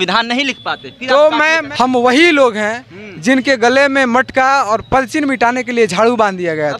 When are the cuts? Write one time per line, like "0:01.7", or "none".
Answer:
0:01.6